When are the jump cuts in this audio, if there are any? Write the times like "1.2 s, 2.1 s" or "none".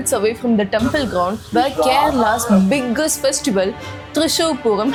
none